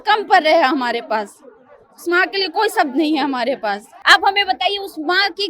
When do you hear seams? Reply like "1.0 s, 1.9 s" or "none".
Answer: 3.9 s